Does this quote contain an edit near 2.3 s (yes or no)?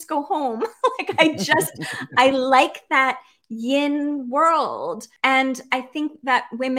no